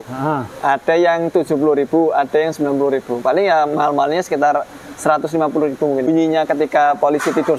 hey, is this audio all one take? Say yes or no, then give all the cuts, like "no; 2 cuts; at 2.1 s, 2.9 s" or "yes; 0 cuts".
no; 1 cut; at 6.1 s